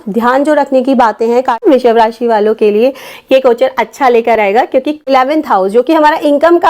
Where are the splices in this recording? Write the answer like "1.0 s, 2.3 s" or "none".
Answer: 1.6 s, 5.1 s